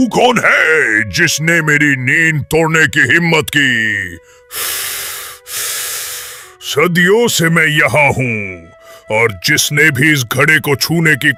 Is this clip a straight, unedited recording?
yes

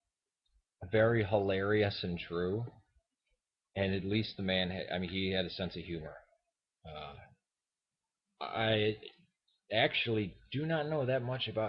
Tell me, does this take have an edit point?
yes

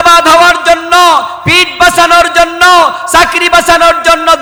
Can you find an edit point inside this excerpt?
no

